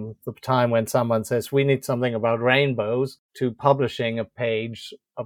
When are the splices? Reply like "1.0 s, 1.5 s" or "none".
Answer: 3.2 s